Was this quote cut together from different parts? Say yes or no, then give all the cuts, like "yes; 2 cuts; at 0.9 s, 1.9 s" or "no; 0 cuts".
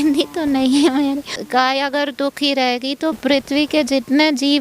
yes; 2 cuts; at 1.4 s, 3.2 s